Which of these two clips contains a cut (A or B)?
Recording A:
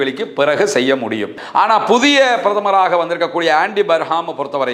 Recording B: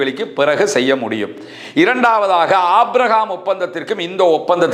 A